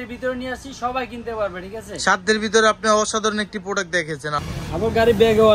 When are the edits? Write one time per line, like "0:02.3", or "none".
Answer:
0:04.4